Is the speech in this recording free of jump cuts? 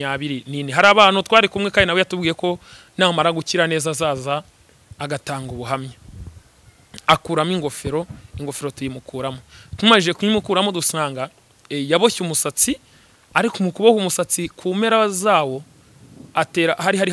yes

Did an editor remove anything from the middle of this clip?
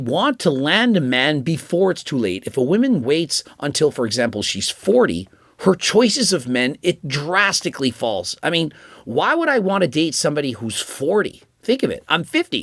no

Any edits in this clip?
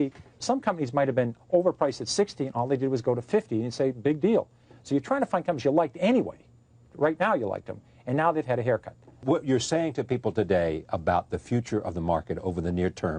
yes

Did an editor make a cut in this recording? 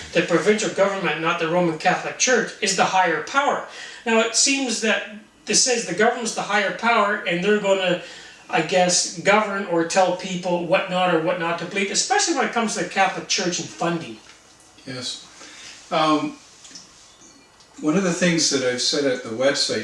no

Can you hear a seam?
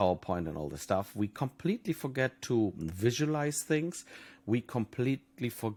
no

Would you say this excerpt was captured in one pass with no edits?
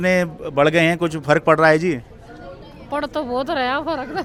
yes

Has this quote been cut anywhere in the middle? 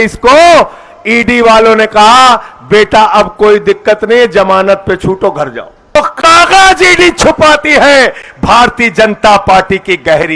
yes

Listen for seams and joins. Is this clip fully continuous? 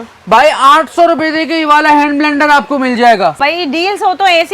no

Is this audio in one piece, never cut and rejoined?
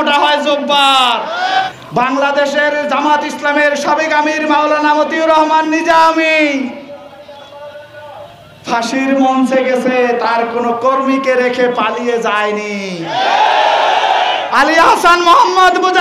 no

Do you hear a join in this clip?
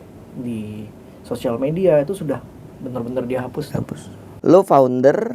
yes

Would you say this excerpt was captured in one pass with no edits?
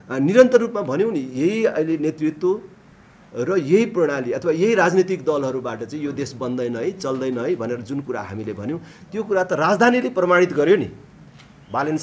yes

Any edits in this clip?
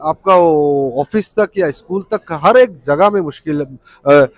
no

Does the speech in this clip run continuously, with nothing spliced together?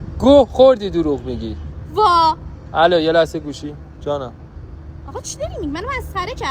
no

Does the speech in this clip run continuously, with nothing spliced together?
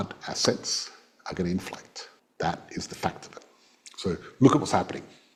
yes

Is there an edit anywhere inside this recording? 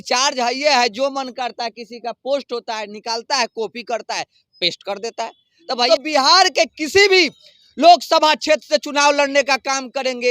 yes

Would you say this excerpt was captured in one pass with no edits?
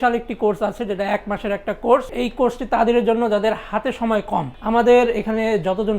no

